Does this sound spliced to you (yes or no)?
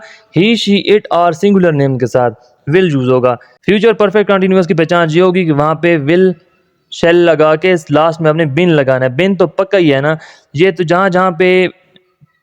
yes